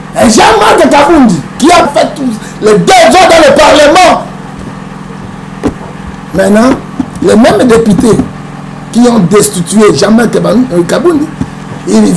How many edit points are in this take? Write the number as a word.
one